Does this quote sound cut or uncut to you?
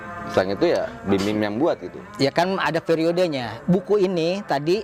uncut